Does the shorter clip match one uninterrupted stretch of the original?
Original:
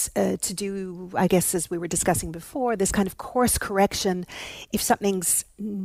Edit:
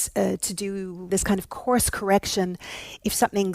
no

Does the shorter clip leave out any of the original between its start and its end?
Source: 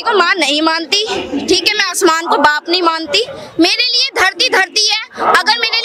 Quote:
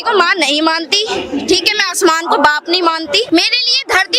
yes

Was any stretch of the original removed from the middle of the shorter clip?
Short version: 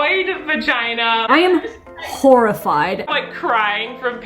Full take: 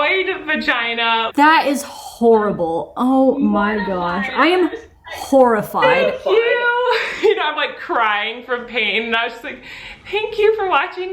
yes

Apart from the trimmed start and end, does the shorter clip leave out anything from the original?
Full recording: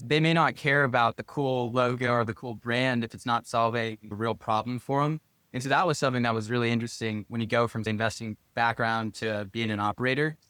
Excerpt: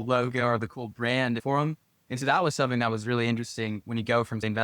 yes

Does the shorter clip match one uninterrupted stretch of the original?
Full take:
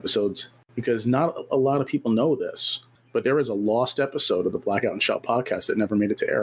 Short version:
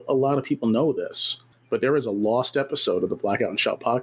yes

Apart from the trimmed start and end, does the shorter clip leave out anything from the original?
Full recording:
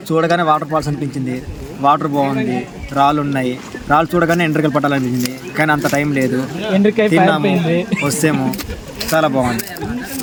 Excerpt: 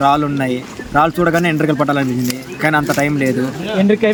no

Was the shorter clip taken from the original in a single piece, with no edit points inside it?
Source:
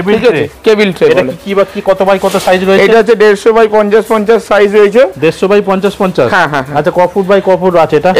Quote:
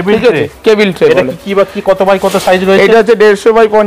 yes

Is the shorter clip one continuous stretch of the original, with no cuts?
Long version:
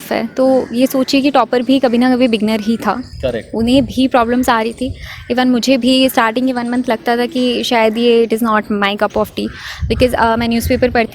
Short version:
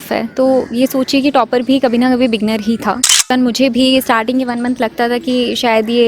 no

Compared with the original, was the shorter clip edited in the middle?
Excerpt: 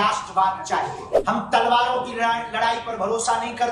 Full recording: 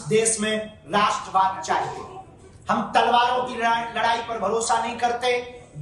yes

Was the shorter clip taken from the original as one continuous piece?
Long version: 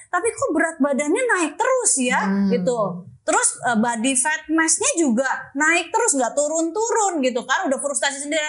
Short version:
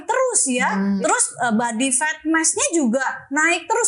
no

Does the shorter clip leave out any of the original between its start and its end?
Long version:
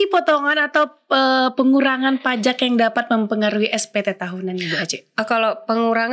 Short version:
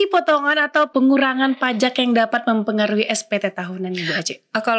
yes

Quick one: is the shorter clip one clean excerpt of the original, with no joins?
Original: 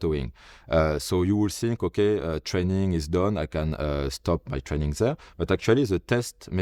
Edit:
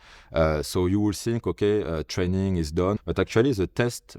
no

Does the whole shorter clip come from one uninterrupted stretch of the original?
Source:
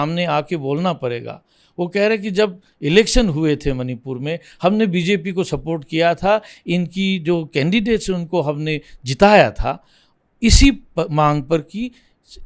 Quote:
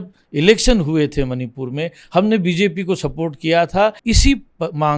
no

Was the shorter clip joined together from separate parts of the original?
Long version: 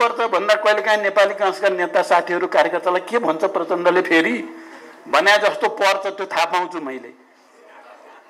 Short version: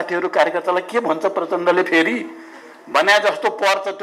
no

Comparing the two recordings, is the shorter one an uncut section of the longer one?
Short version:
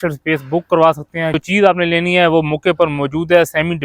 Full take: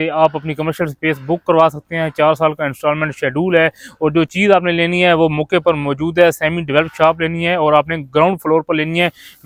no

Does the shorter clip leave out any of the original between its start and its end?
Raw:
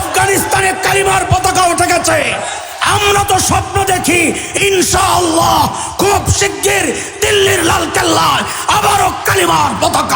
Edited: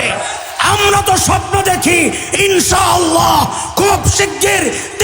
no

